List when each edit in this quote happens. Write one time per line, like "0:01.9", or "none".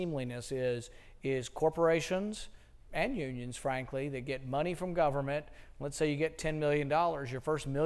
0:01.8